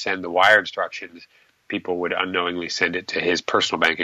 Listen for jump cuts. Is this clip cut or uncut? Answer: uncut